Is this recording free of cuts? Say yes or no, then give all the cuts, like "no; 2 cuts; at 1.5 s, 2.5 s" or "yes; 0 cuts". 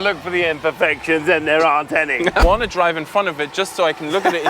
no; 1 cut; at 2.4 s